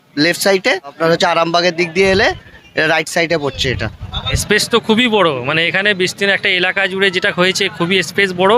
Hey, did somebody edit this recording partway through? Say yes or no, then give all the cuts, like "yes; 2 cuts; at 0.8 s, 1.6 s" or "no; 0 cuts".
yes; 2 cuts; at 1.0 s, 4.4 s